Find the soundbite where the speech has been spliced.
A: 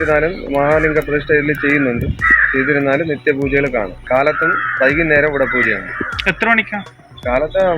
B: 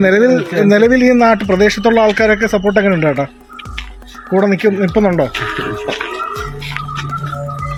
A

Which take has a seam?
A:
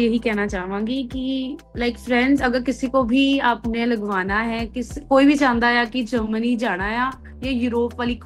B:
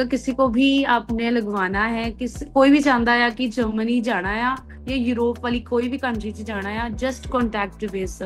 A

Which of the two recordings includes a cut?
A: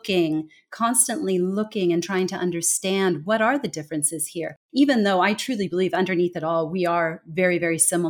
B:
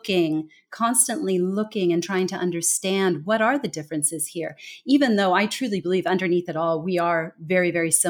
A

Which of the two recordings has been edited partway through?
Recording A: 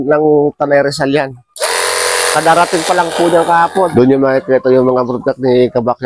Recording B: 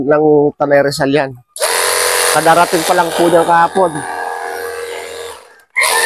A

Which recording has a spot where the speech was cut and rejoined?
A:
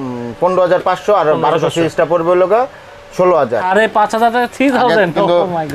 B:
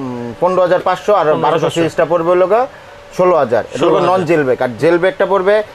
A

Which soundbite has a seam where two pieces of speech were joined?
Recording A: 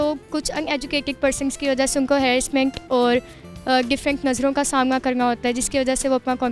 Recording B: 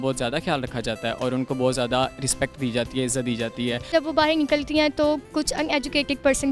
B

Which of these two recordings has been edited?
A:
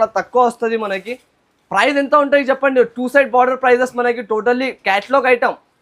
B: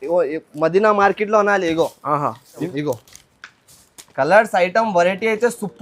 B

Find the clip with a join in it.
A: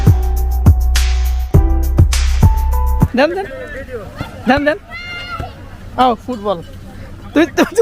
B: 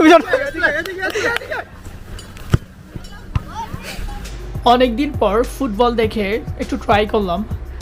A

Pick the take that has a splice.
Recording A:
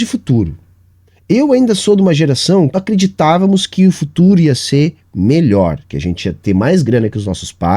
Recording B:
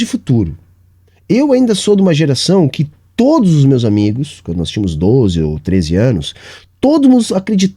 A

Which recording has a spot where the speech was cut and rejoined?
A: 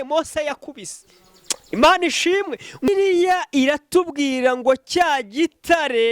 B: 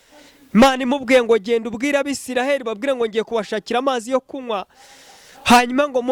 A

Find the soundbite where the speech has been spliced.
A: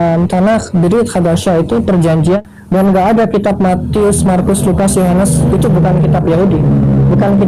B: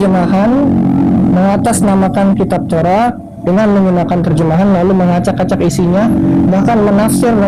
A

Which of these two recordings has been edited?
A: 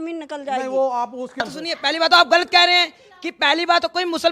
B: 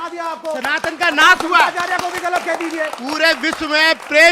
A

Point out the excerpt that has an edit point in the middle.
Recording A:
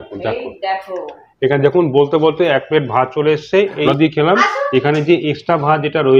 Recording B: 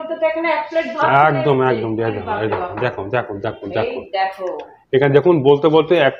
A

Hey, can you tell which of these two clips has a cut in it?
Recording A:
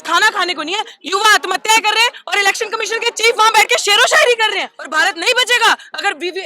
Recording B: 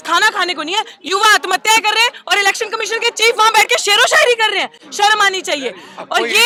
A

